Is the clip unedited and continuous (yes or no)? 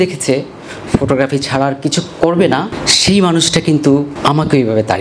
no